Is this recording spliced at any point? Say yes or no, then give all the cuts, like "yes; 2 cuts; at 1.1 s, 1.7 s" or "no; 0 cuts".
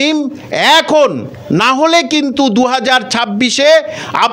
no; 0 cuts